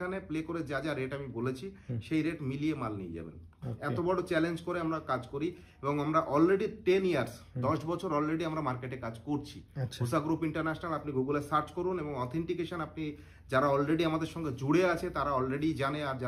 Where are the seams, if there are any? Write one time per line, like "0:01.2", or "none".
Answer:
none